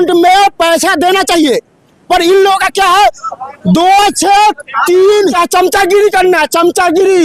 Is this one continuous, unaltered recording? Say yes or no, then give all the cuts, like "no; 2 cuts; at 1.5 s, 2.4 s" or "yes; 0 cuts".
no; 1 cut; at 5.3 s